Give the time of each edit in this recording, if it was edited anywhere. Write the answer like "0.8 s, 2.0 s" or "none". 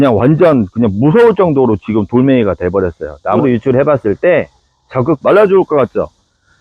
3.4 s, 5.2 s